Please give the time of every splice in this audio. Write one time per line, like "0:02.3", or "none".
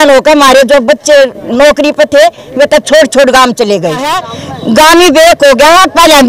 0:04.4